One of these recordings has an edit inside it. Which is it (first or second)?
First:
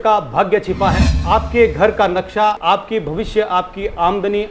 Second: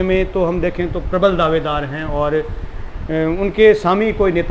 first